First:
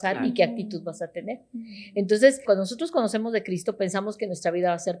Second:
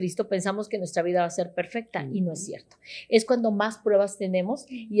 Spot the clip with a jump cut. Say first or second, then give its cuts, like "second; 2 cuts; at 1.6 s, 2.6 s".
first; 1 cut; at 2.4 s